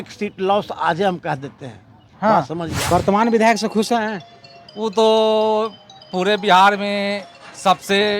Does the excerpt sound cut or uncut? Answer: cut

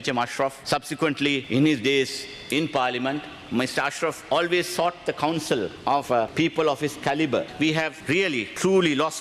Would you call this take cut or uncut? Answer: cut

